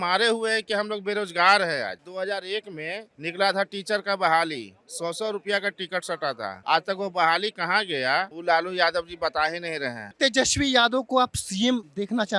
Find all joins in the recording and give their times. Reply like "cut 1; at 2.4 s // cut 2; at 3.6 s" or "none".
cut 1; at 10.0 s